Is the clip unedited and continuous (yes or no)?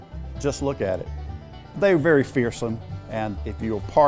no